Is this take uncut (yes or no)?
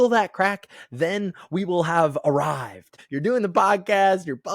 no